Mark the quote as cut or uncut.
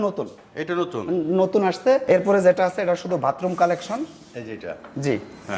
cut